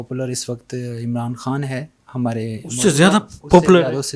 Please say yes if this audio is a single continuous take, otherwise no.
yes